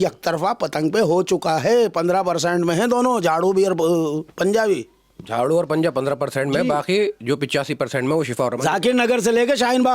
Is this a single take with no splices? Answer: yes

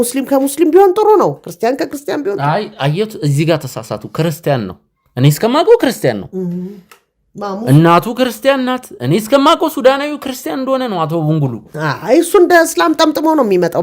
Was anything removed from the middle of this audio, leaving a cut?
no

